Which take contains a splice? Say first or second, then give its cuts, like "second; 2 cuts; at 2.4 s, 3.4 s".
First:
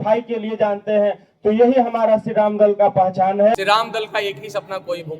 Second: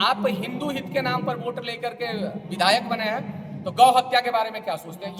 first; 1 cut; at 3.6 s